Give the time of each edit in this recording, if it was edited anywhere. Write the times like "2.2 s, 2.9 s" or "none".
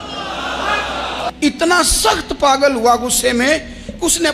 1.3 s